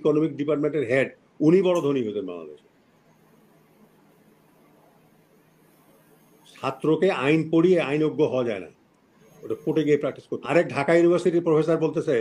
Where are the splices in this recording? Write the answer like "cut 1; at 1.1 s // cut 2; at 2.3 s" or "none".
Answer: cut 1; at 10.3 s